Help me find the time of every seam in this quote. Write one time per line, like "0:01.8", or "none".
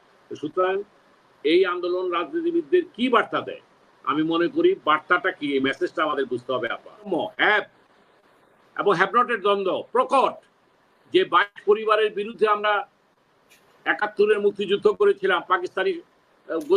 0:07.1

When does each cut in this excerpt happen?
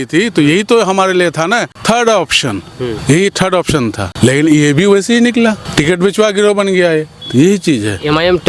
0:01.7
0:03.0
0:04.0
0:05.6

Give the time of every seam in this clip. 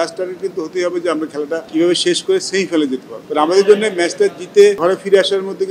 0:01.7
0:03.1
0:04.8

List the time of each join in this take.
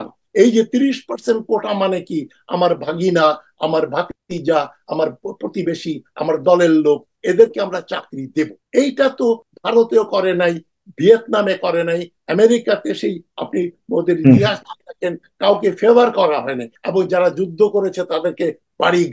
0:04.2
0:08.6
0:09.5
0:16.8

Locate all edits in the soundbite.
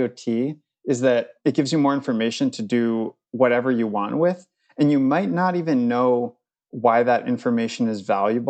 0:01.3

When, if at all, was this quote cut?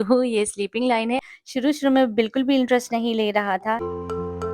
0:01.3
0:03.8

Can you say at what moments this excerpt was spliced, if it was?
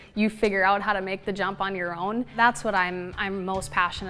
0:02.3

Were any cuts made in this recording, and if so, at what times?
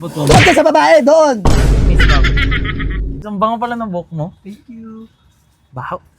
0:03.2

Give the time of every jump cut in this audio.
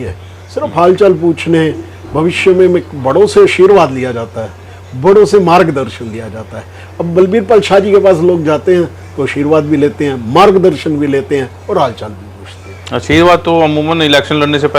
none

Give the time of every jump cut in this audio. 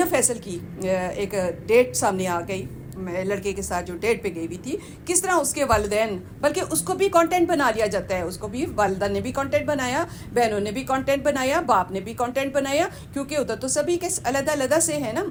none

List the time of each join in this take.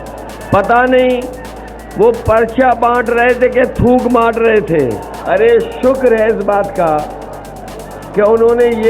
0:05.1

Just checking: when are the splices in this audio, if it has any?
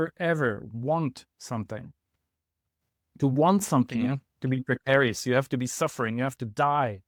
none

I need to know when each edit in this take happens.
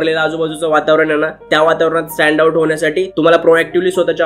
none

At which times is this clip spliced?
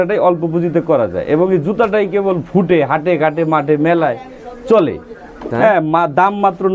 0:05.5

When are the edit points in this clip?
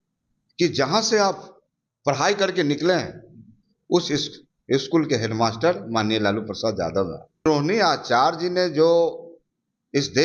0:07.4

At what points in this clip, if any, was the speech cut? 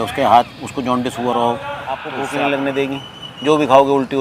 0:02.1

